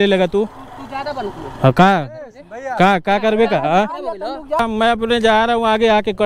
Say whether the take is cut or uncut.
cut